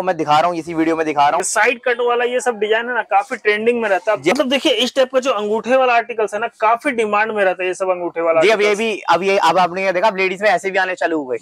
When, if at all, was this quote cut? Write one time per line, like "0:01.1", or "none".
0:01.5
0:04.3